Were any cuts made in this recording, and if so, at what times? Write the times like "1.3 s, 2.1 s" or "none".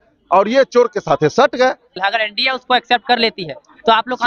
2.0 s